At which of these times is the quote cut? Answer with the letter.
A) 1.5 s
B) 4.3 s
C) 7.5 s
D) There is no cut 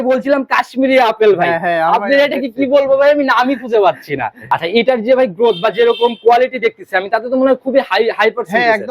B